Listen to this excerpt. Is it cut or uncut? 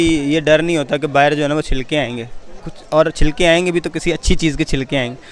uncut